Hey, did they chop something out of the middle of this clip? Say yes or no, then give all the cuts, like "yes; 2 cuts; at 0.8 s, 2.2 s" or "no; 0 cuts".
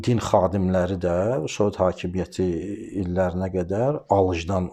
no; 0 cuts